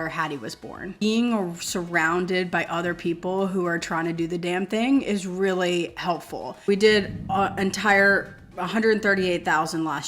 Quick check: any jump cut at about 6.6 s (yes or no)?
yes